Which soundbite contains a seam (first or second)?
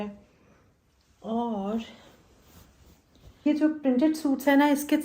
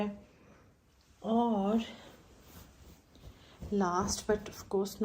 first